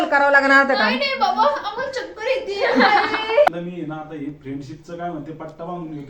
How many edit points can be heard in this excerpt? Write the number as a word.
one